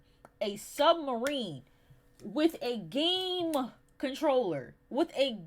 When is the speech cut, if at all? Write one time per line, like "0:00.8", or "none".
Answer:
none